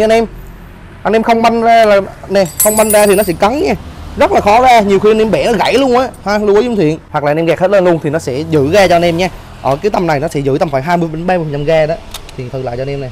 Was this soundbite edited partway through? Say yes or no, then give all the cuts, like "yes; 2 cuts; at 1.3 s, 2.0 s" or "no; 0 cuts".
yes; 1 cut; at 7.1 s